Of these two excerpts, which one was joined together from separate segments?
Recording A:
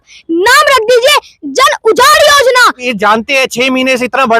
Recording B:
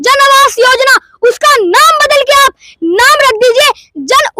A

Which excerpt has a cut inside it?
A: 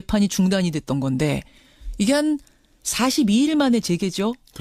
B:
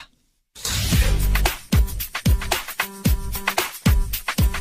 B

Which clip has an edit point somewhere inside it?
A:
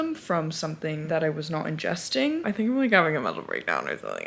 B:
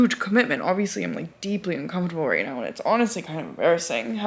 A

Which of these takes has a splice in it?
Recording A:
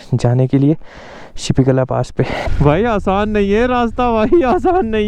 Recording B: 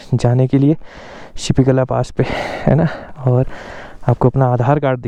A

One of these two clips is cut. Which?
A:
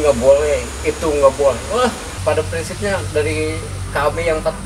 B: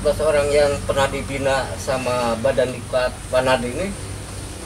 A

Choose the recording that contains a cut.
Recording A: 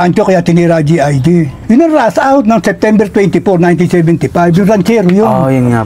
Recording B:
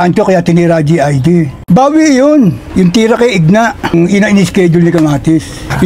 B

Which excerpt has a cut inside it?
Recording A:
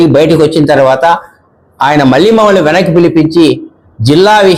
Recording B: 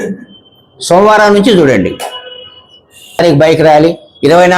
B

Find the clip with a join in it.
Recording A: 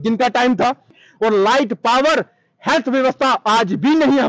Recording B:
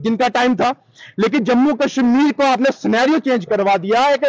A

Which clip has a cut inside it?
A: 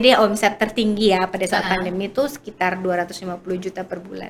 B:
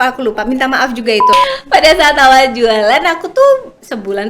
B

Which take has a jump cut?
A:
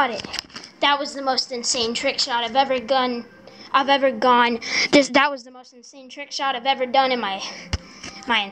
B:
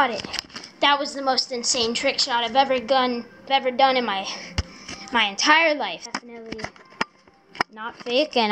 B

